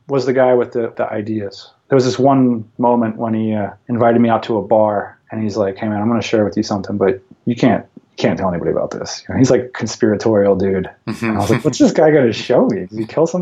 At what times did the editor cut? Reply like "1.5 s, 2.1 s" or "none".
1.5 s, 2.7 s, 3.8 s, 5.2 s